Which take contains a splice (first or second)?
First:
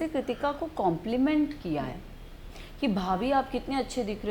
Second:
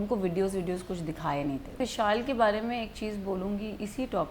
second